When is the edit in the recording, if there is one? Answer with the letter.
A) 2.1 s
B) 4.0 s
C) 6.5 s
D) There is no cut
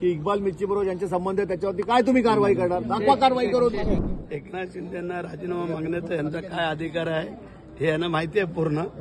B